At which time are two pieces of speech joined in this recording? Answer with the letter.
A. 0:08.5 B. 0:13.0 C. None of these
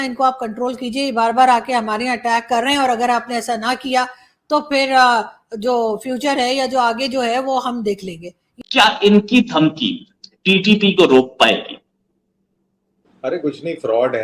A